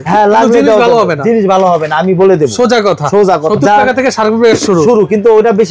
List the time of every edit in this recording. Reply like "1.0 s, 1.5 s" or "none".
3.5 s